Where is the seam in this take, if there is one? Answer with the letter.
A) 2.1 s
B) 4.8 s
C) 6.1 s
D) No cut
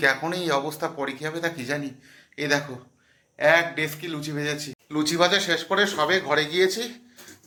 D